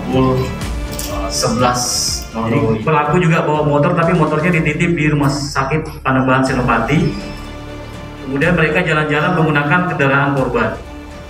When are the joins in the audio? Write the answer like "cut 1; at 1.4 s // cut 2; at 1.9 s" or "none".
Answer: cut 1; at 2.8 s